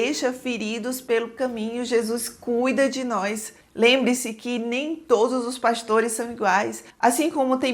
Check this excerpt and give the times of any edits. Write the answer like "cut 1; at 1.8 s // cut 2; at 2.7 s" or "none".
none